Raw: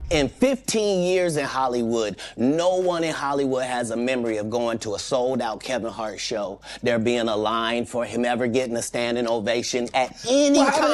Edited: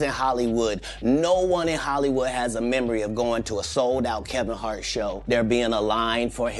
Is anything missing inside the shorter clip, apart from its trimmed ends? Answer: yes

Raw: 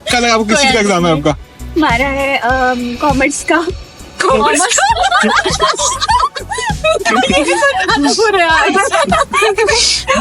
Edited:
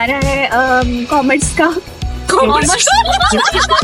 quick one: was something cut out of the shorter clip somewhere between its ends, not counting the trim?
no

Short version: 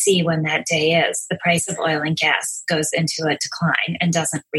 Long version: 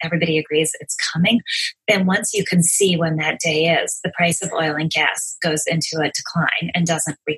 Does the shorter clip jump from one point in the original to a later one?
no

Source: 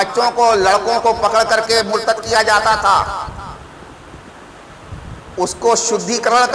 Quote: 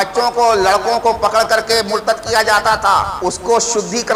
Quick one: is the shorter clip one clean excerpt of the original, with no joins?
no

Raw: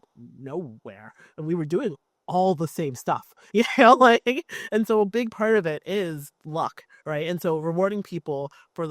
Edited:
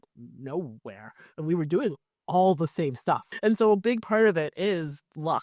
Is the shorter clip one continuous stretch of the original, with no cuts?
no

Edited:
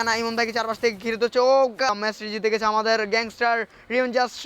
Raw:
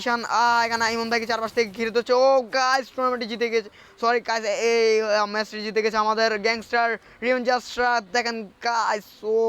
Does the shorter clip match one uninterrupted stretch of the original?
no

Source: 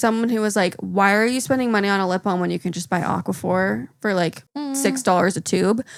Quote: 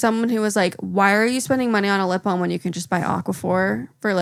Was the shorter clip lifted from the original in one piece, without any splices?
yes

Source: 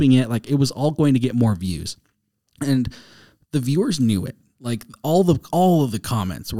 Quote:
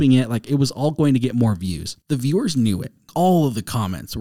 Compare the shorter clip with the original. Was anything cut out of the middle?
yes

